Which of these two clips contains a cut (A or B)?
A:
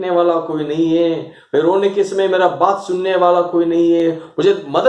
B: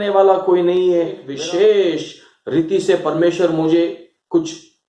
B